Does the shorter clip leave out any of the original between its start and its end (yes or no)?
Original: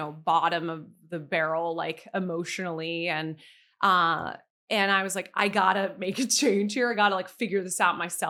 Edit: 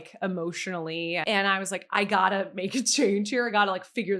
yes